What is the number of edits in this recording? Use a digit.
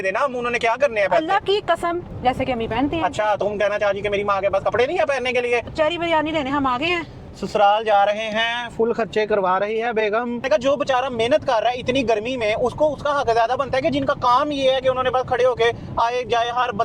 3